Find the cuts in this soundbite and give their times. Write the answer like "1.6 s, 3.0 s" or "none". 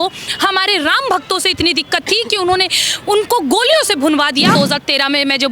4.5 s